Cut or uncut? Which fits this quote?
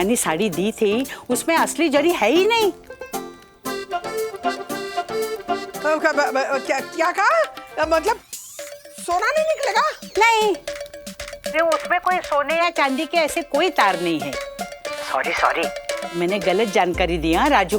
cut